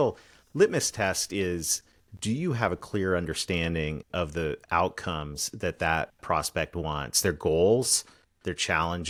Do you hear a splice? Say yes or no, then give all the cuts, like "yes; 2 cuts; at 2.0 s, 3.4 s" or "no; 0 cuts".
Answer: no; 0 cuts